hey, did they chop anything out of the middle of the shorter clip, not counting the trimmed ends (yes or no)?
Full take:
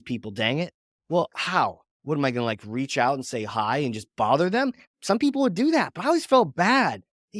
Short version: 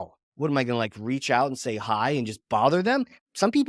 no